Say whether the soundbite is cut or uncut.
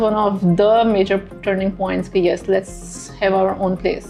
uncut